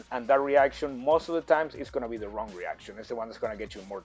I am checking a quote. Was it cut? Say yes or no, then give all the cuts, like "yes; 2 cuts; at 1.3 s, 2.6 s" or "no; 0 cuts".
no; 0 cuts